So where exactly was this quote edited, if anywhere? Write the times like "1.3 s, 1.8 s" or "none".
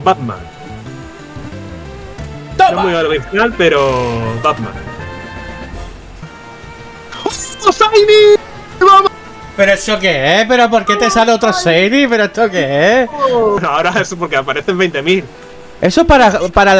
6.3 s, 13.6 s

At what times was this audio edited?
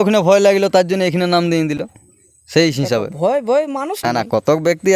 none

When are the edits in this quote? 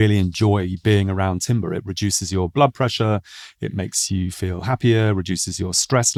none

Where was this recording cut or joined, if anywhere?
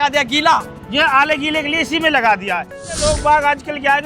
2.9 s

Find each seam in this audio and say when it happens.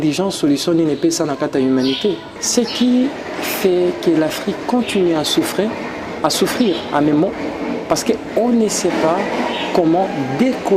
2.3 s

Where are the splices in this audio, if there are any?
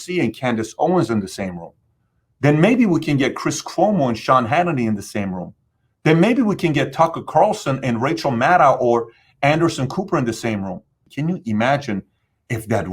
11.0 s

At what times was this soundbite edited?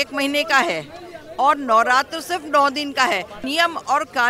3.3 s

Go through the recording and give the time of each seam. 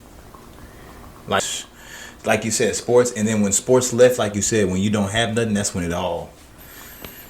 1.4 s

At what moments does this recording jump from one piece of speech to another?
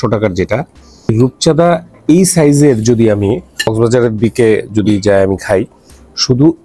1.1 s, 3.7 s

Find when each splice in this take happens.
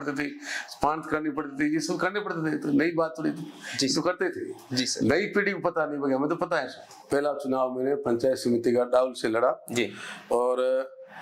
7.0 s

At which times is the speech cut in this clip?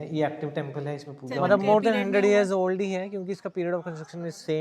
1.3 s

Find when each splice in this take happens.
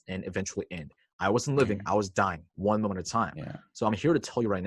none

